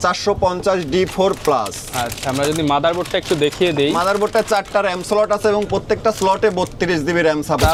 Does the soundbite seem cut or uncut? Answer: uncut